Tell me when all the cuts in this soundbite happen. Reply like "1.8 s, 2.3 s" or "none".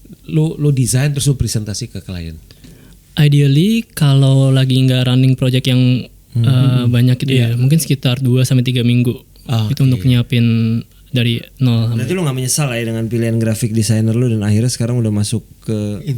12.0 s